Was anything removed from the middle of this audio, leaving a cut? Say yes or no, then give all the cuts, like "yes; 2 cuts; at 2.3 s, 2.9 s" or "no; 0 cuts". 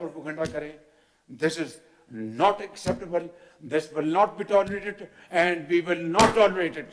no; 0 cuts